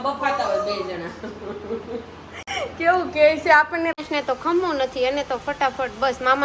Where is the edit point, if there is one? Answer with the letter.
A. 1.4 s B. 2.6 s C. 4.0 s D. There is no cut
C